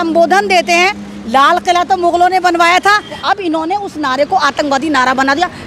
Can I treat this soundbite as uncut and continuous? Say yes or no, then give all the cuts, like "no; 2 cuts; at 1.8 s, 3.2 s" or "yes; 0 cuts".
no; 1 cut; at 3.1 s